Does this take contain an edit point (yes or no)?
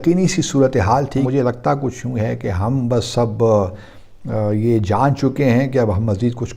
yes